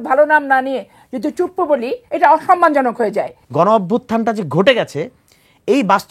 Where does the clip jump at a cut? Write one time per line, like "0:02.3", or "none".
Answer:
0:02.0
0:03.4